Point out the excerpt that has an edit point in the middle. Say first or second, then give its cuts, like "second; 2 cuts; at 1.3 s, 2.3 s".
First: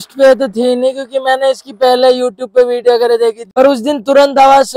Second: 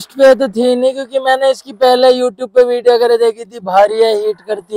first; 1 cut; at 3.4 s